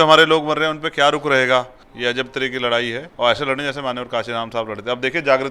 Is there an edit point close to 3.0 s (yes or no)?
yes